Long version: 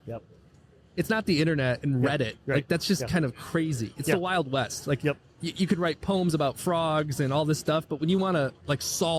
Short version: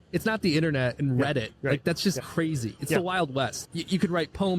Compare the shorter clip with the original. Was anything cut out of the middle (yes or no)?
yes